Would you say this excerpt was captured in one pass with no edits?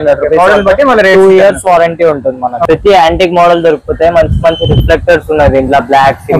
no; 1 cut; at 2.6 s

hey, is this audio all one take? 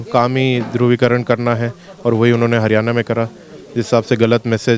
yes; 0 cuts

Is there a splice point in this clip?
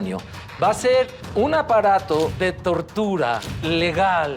yes; 3 cuts; at 1.2 s, 2.3 s, 3.5 s

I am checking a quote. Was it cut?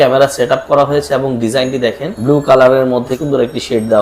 yes; 2 cuts; at 2.1 s, 3.1 s

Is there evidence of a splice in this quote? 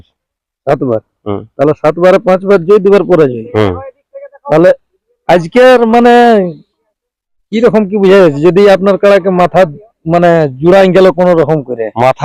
no; 0 cuts

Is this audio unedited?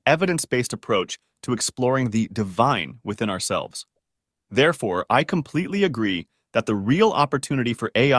yes; 0 cuts

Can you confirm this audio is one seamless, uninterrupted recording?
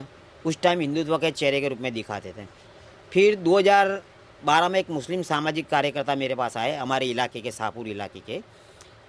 yes; 0 cuts

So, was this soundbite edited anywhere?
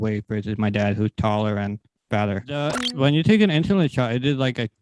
yes; 1 cut; at 2.7 s

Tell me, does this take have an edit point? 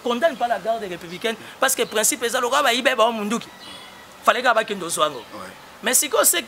no; 0 cuts

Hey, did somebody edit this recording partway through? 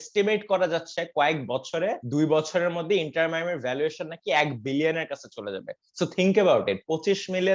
no; 0 cuts

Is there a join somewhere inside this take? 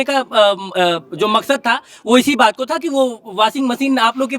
no; 0 cuts

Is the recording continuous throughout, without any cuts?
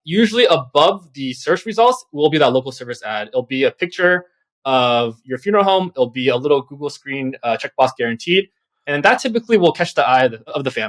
yes; 0 cuts

